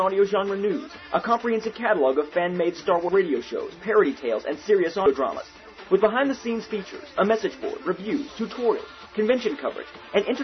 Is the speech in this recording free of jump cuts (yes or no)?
no